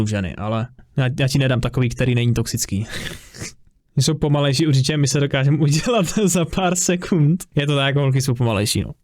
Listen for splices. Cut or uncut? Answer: cut